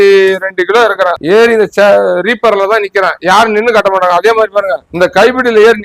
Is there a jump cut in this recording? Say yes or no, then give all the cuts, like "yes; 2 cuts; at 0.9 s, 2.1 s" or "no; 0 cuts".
yes; 2 cuts; at 1.2 s, 4.8 s